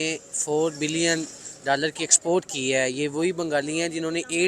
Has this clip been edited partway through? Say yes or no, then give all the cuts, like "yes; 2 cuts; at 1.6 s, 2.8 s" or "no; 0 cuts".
no; 0 cuts